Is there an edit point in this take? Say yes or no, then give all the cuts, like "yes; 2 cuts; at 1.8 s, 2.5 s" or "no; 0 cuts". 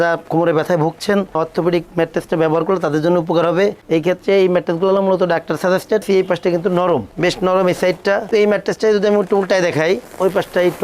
yes; 2 cuts; at 6.0 s, 8.3 s